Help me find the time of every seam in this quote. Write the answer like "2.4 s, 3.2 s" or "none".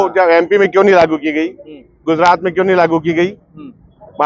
none